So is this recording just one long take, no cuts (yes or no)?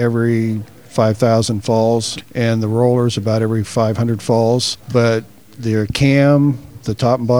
no